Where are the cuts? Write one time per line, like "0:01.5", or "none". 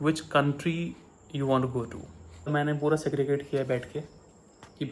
0:02.5